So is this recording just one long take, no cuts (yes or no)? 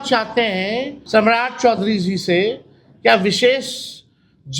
no